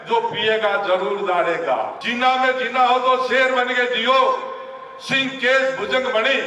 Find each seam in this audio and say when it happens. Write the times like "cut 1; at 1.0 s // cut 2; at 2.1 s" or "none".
cut 1; at 2.0 s

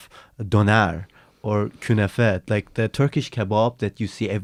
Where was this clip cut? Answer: none

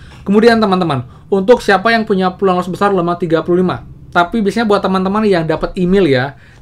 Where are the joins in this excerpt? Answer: cut 1; at 4.0 s

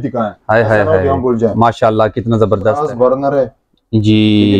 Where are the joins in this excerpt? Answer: cut 1; at 2.8 s

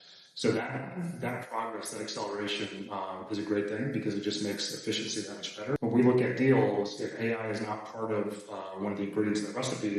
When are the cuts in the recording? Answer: cut 1; at 5.8 s

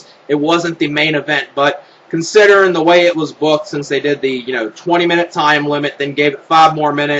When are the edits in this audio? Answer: cut 1; at 4.7 s

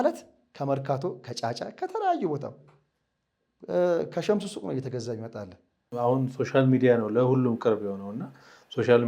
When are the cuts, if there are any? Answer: cut 1; at 5.8 s

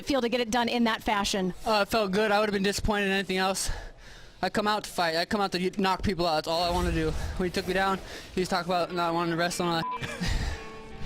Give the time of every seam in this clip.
cut 1; at 10.0 s

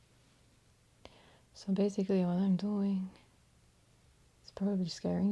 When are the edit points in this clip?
none

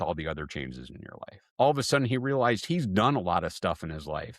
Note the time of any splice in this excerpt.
cut 1; at 1.4 s

